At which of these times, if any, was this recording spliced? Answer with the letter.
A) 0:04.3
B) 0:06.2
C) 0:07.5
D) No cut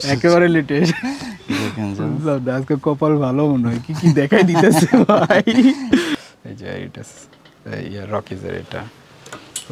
B